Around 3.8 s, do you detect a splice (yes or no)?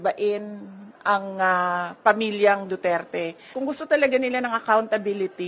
yes